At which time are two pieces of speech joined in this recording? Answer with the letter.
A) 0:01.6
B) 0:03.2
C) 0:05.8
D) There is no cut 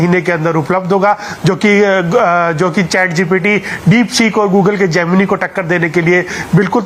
D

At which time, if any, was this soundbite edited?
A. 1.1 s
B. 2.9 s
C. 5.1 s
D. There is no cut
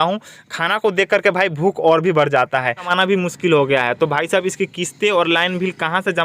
B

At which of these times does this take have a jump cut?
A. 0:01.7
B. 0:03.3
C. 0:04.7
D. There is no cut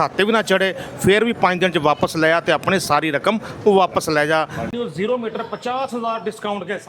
C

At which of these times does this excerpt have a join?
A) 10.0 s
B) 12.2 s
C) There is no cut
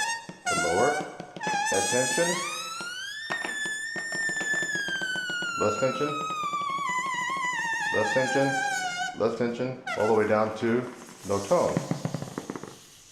B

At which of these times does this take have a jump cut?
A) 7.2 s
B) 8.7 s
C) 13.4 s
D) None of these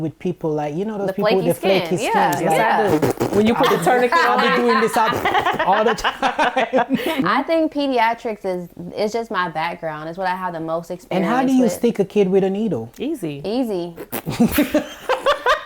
A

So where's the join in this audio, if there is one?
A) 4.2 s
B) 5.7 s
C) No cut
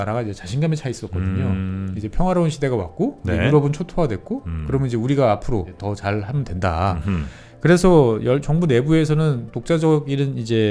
B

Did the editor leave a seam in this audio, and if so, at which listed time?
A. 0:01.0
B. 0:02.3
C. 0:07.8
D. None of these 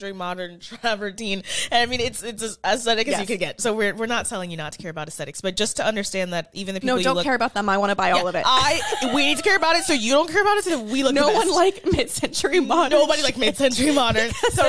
D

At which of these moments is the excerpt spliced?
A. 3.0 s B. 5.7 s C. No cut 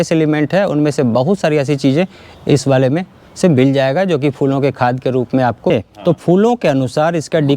B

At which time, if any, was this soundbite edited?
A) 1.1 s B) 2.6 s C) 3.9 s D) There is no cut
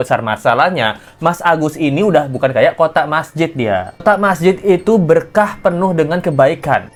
D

